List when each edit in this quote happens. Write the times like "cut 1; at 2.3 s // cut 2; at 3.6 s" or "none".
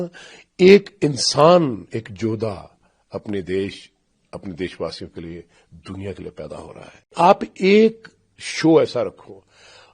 cut 1; at 7.1 s